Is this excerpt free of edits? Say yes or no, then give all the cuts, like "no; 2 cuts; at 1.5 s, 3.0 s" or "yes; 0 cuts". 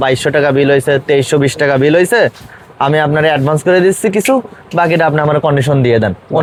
yes; 0 cuts